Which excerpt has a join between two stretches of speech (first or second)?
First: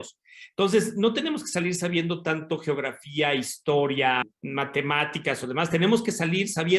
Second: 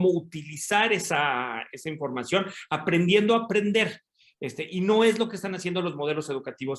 first